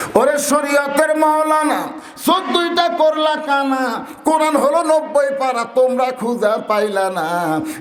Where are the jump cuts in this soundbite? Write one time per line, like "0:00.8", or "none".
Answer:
none